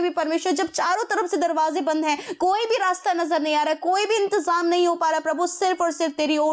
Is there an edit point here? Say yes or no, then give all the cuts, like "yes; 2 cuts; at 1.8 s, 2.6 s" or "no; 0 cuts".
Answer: no; 0 cuts